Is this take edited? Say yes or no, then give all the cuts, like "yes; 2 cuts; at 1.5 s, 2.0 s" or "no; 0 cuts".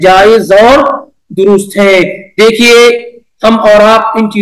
no; 0 cuts